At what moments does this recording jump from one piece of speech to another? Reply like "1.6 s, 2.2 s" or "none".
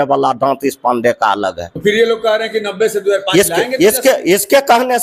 1.7 s